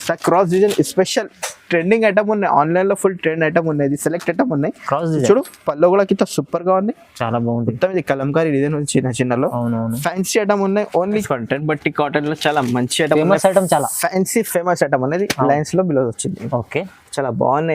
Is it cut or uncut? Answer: cut